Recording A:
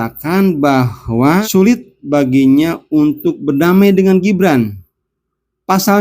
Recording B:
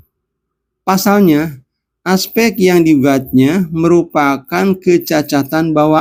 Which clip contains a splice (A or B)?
A